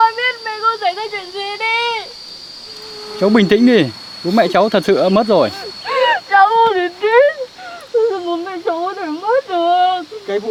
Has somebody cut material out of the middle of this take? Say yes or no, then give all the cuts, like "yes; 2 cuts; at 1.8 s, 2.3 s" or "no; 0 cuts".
no; 0 cuts